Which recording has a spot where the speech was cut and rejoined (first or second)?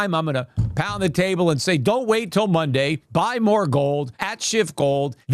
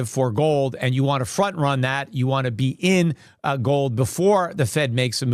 first